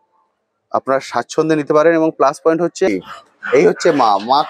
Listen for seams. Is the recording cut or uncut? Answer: cut